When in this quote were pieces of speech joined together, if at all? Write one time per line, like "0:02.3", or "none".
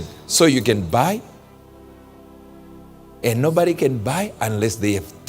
0:01.3
0:03.1